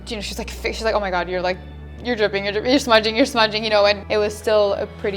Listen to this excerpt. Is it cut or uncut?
cut